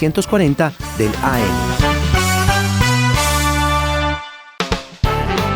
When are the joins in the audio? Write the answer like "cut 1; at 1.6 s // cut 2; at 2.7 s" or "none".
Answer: cut 1; at 1.5 s // cut 2; at 4.4 s